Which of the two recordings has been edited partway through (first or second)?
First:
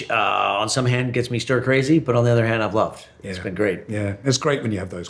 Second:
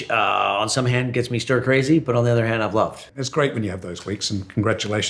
second